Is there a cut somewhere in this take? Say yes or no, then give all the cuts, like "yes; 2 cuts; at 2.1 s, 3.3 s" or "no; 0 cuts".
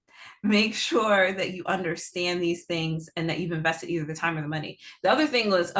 no; 0 cuts